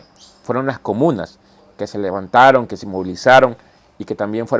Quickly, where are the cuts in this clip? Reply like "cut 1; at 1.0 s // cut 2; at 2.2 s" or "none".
none